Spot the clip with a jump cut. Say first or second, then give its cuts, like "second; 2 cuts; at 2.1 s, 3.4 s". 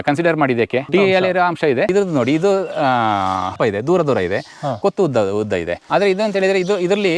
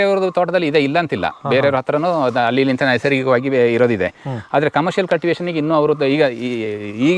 first; 4 cuts; at 0.9 s, 1.9 s, 3.6 s, 5.8 s